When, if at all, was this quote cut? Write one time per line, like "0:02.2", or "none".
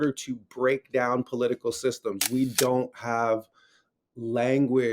0:02.2